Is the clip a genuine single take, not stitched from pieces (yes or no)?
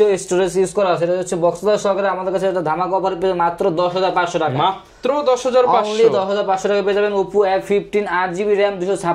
yes